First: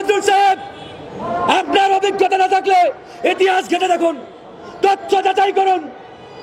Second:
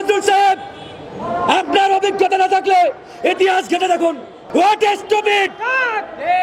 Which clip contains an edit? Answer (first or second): second